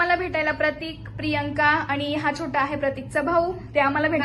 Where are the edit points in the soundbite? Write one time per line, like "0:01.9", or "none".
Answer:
none

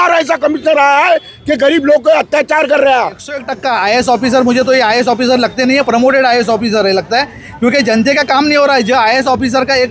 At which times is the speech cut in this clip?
0:03.4

